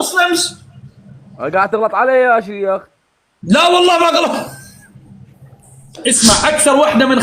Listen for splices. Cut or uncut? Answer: cut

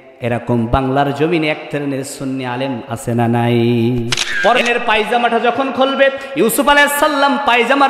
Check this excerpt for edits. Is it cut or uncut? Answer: cut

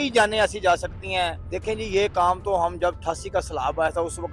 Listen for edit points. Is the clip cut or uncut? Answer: cut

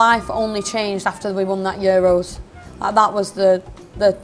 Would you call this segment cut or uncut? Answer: uncut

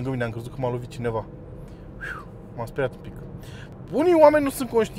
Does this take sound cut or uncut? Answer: cut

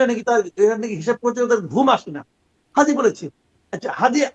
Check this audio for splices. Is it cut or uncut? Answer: uncut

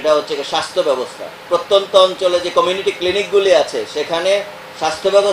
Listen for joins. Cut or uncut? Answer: cut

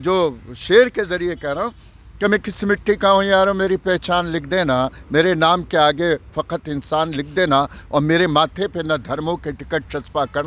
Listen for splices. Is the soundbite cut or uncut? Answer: uncut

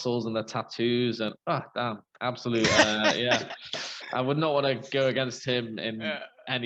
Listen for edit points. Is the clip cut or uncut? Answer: uncut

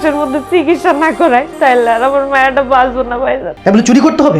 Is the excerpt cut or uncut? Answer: cut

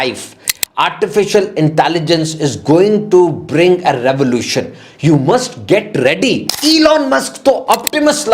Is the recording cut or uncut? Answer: cut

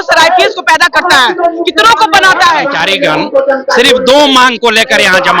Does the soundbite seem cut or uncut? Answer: cut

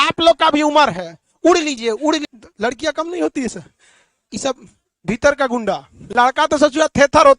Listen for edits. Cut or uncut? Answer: cut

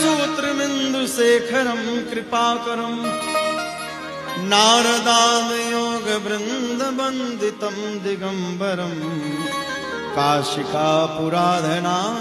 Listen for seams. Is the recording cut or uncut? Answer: cut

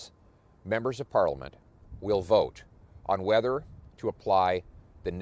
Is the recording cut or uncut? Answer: uncut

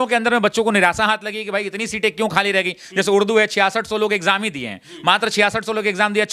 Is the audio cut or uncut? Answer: uncut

